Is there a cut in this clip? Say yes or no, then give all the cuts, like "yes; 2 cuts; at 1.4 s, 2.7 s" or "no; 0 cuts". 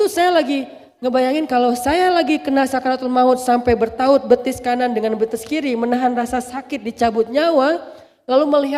no; 0 cuts